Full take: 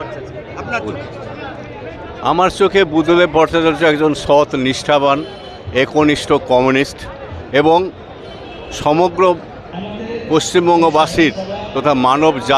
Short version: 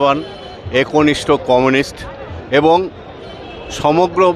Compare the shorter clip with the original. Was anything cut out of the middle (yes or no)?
no